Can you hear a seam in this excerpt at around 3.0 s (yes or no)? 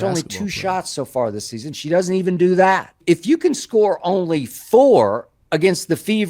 yes